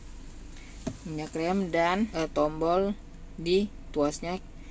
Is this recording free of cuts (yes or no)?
no